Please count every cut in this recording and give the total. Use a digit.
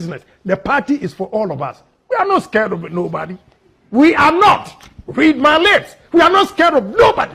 0